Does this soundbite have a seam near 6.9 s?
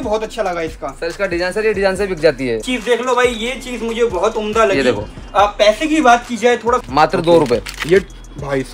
yes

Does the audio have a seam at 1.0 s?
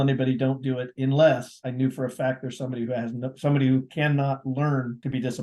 no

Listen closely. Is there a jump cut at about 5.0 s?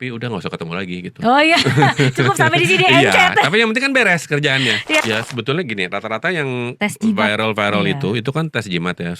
yes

